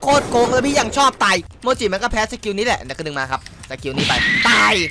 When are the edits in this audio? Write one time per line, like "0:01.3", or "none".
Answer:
0:01.4

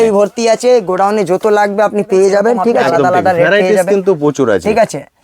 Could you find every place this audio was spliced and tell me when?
0:02.8

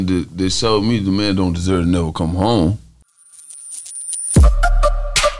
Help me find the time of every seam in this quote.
0:03.1

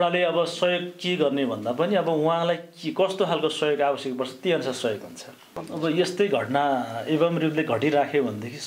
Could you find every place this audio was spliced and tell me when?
0:05.7

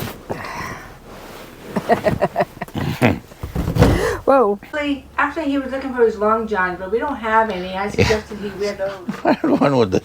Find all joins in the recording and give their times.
0:04.7

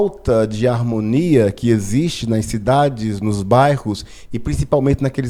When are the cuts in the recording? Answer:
none

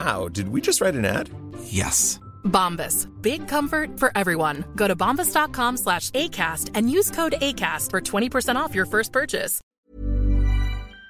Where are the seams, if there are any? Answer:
0:09.7

